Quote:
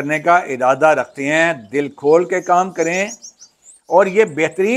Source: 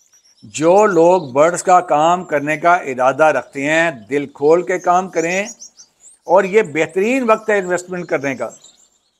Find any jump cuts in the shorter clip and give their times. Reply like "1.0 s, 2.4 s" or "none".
none